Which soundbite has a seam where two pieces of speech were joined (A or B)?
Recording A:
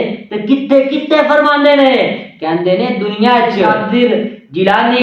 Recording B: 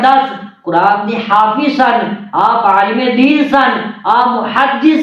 A